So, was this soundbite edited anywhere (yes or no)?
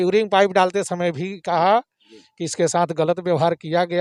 no